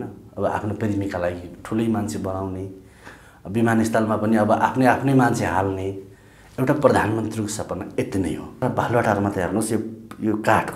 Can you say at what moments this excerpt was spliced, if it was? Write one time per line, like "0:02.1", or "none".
0:08.6